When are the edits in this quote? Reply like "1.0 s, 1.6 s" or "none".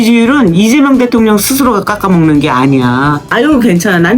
3.3 s